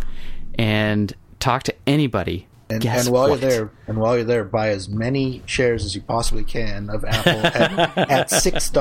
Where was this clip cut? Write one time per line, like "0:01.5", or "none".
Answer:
0:02.5